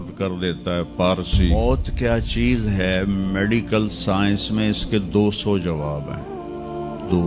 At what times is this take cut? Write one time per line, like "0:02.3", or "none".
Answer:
0:01.5